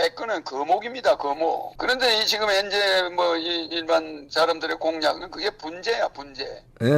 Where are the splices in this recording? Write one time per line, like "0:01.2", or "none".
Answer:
0:01.7